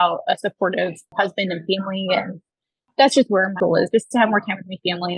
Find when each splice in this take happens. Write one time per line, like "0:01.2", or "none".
0:01.0
0:02.9
0:03.6